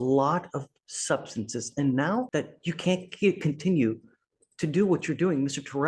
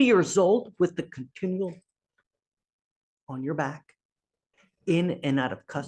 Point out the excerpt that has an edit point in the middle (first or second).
first